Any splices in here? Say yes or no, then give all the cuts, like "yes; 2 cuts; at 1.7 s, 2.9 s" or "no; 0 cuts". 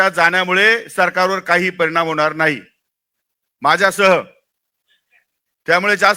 no; 0 cuts